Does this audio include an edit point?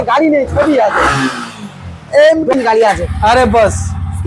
yes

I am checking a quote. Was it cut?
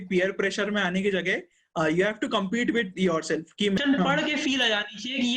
yes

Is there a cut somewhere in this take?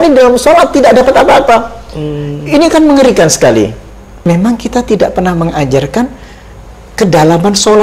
yes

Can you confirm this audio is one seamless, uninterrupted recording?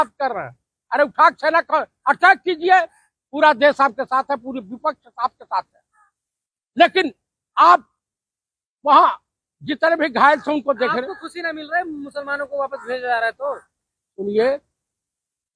yes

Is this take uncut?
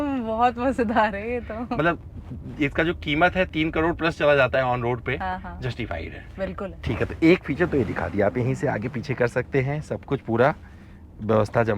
yes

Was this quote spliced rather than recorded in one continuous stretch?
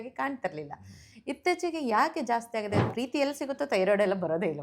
yes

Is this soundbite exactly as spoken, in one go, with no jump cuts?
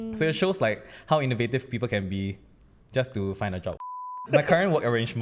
no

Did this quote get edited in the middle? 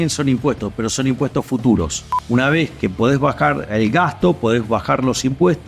yes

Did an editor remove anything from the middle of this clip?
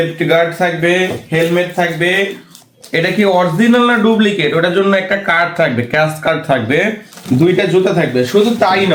no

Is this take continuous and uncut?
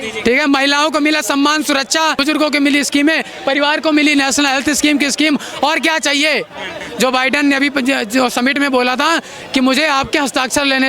no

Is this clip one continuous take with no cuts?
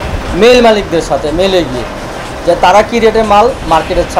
yes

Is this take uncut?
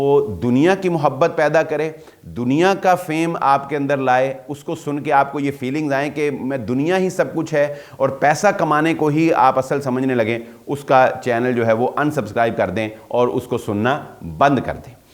yes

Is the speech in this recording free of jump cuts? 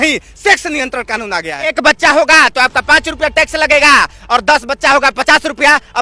no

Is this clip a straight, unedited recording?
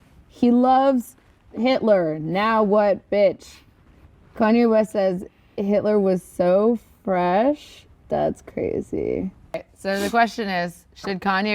no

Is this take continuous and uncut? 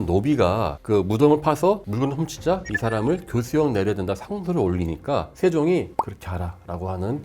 yes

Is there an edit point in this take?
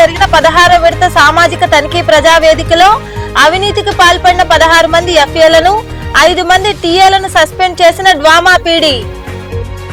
no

